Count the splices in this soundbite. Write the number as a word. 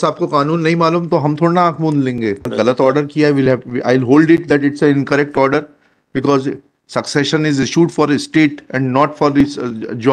one